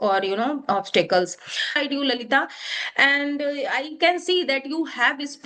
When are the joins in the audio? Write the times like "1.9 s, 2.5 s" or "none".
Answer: 1.8 s